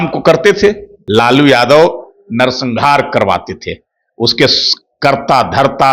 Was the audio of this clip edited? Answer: yes; 1 cut; at 0.9 s

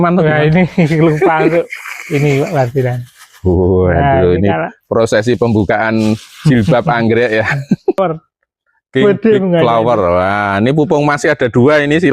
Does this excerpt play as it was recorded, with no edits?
no; 1 cut; at 8.0 s

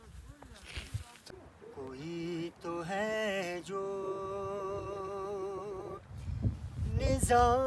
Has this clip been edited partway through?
yes; 1 cut; at 1.1 s

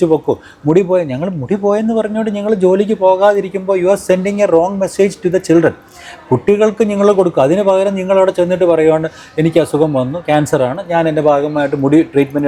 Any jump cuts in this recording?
no; 0 cuts

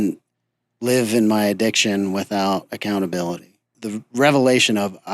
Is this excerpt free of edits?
no; 1 cut; at 3.8 s

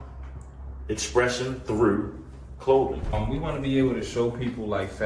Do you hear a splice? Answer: yes; 1 cut; at 3.1 s

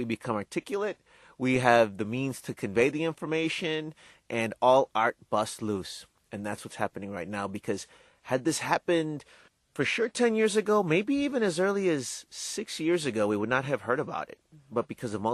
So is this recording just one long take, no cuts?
yes; 0 cuts

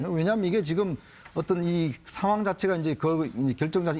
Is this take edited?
yes; 1 cut; at 1.4 s

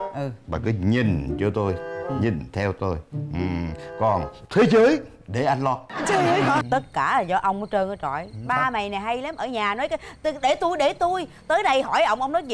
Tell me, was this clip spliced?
yes; 1 cut; at 6.6 s

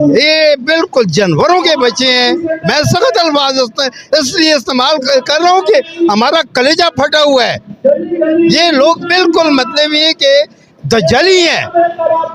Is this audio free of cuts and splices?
yes; 0 cuts

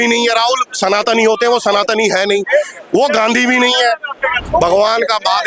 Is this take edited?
yes; 1 cut; at 4.4 s

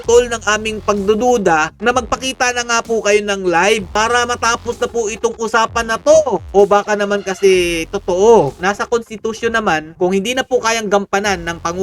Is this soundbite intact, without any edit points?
no; 2 cuts; at 3.9 s, 8.5 s

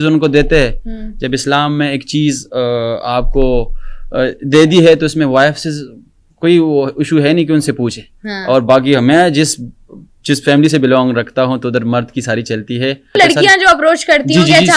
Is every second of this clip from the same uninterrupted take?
no; 1 cut; at 13.2 s

